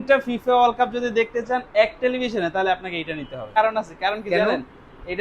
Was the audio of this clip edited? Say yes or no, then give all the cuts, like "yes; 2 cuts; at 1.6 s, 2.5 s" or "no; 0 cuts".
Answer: yes; 1 cut; at 3.6 s